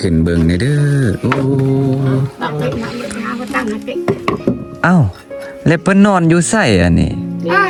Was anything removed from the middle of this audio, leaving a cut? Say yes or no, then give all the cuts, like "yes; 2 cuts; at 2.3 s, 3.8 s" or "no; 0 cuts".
no; 0 cuts